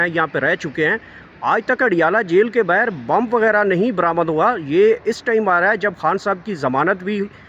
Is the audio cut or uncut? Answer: uncut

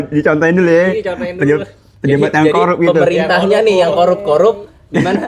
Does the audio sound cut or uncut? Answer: uncut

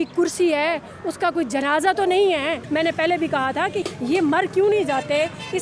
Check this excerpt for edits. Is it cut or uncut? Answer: cut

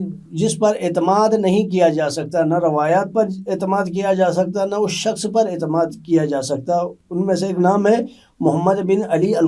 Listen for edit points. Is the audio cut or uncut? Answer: uncut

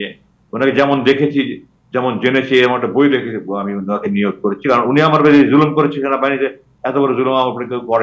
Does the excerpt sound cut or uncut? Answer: uncut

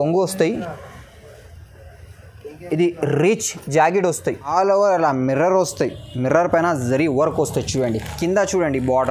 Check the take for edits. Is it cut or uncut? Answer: cut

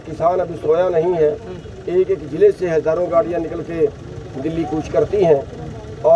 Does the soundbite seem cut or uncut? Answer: uncut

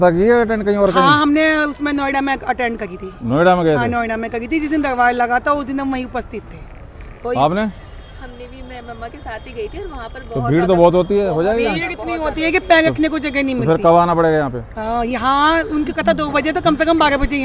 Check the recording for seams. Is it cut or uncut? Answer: uncut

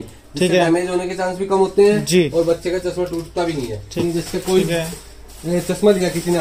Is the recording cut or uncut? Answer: cut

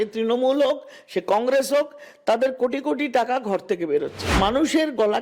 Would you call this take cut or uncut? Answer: cut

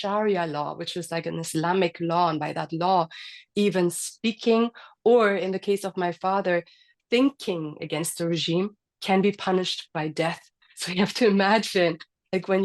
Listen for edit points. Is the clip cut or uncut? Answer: cut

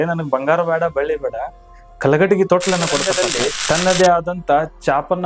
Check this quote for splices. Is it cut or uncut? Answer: cut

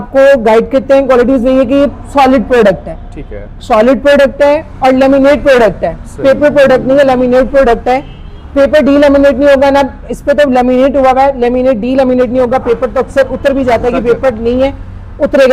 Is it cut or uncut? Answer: uncut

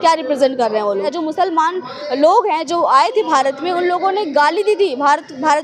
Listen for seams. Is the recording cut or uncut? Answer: cut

